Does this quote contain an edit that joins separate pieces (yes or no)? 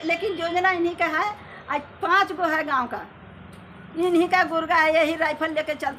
no